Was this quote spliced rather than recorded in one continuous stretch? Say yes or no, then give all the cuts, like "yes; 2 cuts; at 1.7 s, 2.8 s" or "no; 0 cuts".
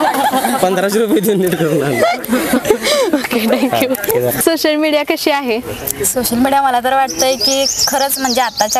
no; 0 cuts